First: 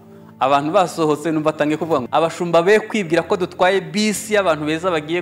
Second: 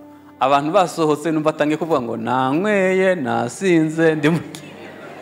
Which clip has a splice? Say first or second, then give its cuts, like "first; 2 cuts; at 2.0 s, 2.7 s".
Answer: first; 1 cut; at 2.0 s